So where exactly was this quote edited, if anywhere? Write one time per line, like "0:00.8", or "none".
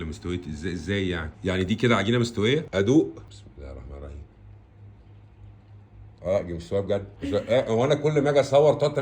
0:01.3
0:02.7
0:03.3
0:06.2
0:07.1